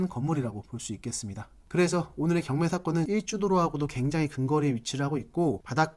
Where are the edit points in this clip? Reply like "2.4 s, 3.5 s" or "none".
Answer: 1.6 s, 3.1 s